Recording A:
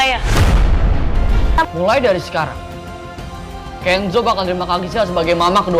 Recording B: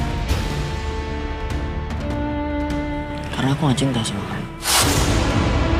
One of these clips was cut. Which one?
A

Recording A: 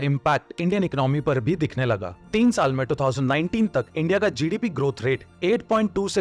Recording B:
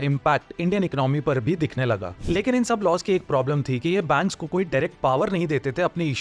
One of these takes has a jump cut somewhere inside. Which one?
B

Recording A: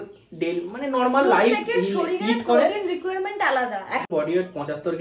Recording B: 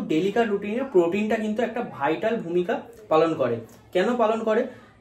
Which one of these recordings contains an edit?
A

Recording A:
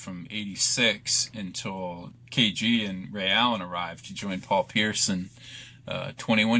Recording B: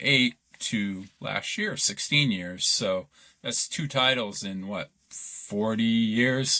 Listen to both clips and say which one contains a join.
A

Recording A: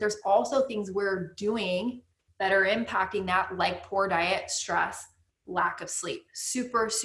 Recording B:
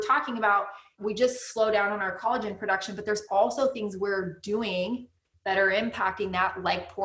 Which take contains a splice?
B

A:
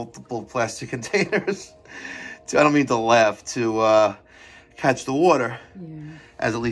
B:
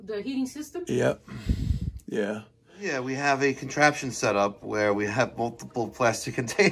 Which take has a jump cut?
B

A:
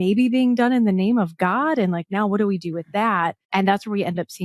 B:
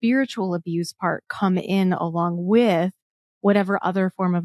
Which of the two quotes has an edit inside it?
A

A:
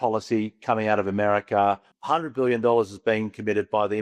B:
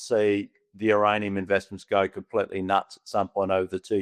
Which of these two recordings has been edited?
A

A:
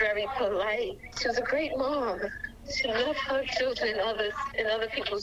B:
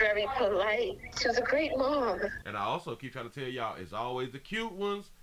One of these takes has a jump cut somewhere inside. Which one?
A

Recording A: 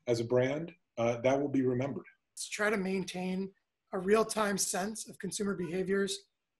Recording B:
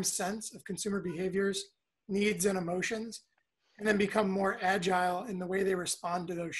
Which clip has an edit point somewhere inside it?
A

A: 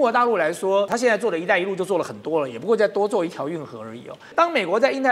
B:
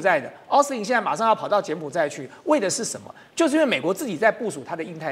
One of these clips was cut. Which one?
A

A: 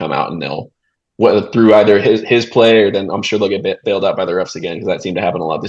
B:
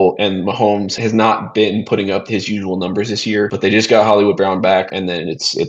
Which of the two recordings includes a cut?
B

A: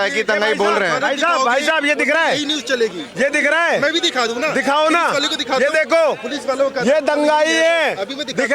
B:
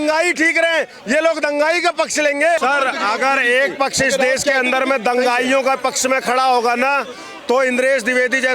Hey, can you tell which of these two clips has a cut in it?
B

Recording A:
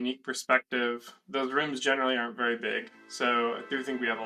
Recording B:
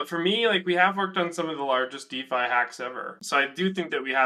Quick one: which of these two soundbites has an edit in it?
B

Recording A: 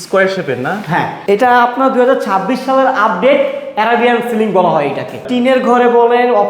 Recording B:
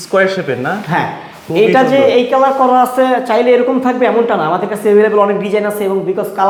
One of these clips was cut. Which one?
A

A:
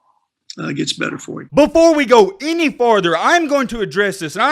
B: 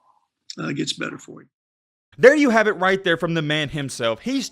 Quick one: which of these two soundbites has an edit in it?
A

